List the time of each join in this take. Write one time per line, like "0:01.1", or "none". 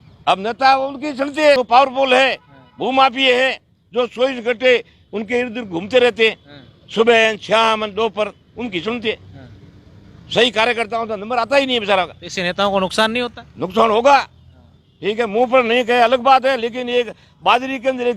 0:01.6